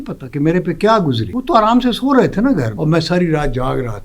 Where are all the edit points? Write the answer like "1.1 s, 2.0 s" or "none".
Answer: 1.3 s, 2.7 s